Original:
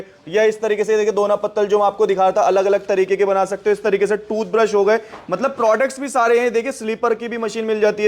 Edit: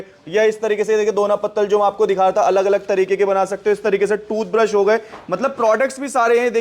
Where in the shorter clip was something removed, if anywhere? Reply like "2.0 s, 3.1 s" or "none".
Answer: none